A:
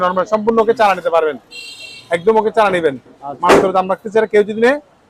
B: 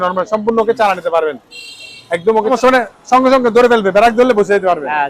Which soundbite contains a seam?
B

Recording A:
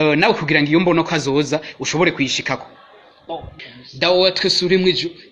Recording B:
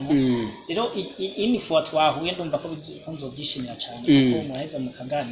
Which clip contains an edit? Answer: A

